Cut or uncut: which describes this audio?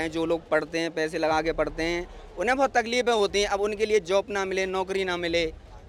uncut